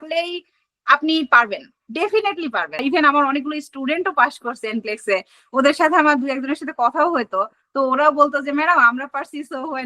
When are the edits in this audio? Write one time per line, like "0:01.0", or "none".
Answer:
0:02.8